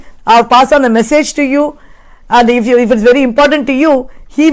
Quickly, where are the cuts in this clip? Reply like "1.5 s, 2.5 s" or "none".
none